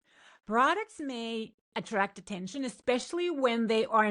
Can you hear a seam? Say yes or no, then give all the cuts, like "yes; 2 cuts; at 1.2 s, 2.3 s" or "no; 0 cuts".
no; 0 cuts